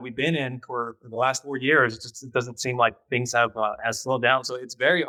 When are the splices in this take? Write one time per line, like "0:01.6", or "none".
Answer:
none